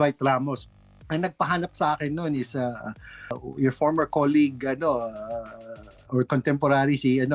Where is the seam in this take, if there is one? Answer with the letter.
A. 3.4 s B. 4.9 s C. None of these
A